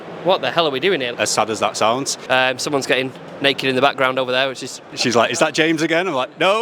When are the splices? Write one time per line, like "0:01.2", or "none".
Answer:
0:01.1
0:02.1
0:04.8